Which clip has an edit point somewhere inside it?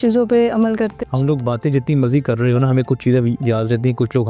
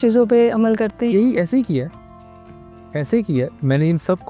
first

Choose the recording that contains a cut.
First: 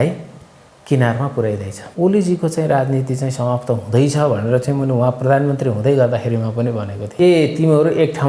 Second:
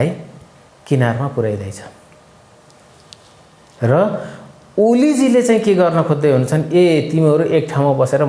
first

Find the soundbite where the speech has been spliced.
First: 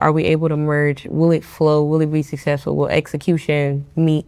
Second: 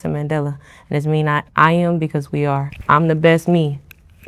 second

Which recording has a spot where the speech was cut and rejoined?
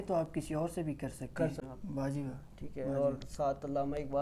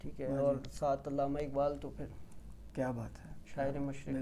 first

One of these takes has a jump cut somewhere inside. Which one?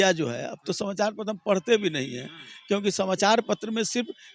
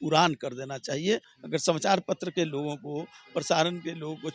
second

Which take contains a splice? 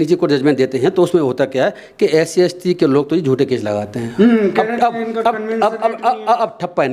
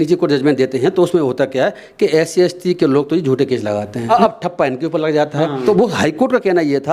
second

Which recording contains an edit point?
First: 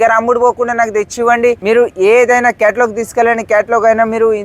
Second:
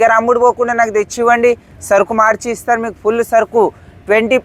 first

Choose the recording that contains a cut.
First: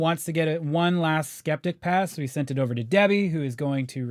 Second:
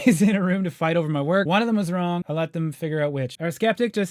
second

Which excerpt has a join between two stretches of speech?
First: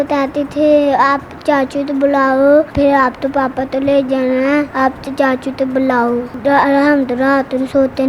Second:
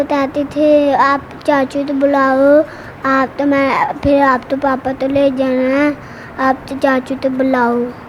first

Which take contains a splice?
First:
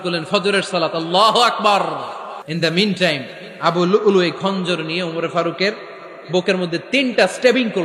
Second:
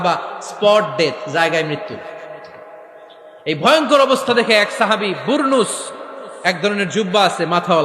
first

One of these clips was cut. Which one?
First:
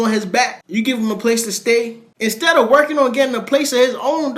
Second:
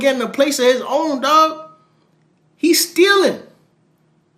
first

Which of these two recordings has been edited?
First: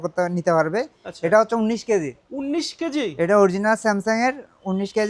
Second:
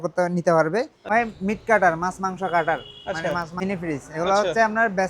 second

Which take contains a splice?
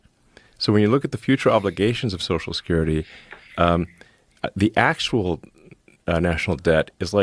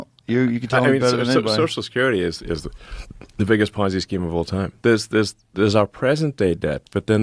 second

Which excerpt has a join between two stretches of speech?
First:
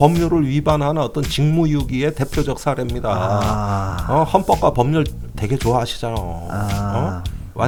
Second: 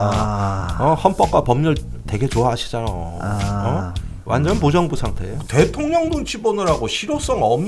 second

